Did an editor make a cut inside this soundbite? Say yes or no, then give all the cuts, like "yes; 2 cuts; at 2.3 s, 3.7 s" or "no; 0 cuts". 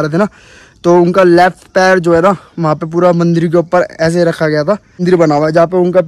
yes; 1 cut; at 5.0 s